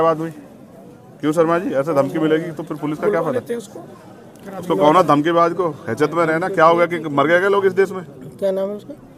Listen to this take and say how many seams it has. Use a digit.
0